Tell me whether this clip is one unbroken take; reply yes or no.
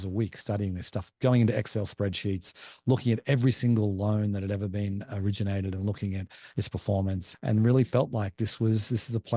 no